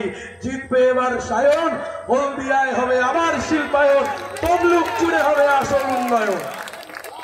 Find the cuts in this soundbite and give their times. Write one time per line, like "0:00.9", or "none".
0:01.0